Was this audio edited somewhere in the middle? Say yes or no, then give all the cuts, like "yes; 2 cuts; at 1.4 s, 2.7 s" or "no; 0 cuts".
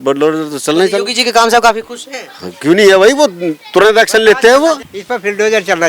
yes; 1 cut; at 4.9 s